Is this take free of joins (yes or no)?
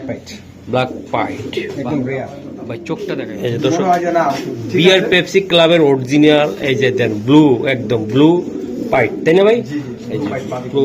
no